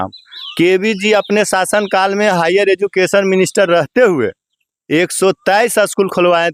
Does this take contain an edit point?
no; 0 cuts

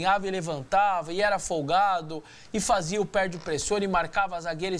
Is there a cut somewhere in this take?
no; 0 cuts

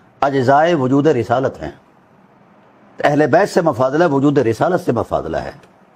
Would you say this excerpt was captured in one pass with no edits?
yes; 0 cuts

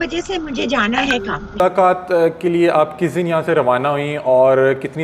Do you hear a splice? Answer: yes; 1 cut; at 1.6 s

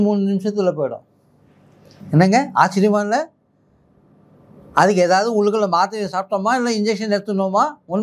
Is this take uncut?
yes; 0 cuts

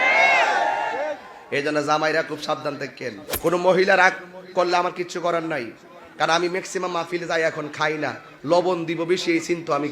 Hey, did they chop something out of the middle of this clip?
yes; 1 cut; at 3.3 s

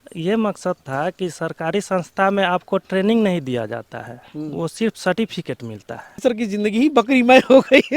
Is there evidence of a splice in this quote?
yes; 1 cut; at 6.2 s

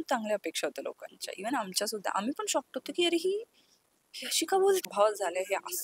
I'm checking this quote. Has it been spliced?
yes; 1 cut; at 4.8 s

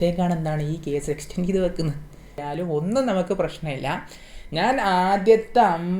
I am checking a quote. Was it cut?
yes; 1 cut; at 2.4 s

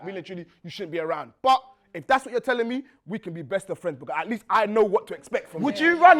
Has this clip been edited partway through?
no; 0 cuts

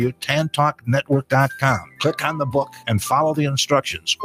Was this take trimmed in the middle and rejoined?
no; 0 cuts

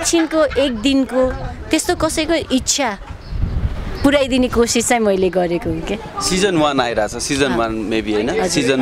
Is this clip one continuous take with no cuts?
yes; 0 cuts

